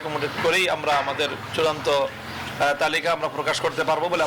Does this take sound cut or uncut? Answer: uncut